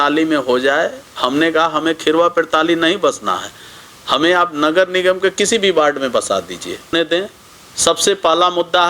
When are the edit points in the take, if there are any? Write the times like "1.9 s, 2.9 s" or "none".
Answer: 6.9 s